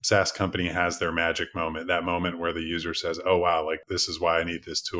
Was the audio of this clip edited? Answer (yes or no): no